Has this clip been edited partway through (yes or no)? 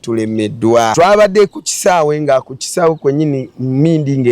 yes